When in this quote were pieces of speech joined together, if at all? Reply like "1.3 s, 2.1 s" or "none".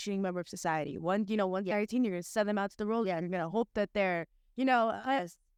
none